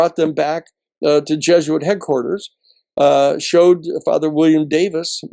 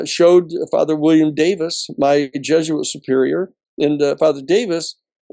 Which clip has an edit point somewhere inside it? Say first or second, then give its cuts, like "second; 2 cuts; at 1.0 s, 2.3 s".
second; 1 cut; at 3.6 s